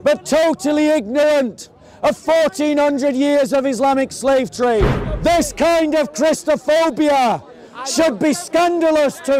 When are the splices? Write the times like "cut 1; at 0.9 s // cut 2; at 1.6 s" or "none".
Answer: cut 1; at 5.0 s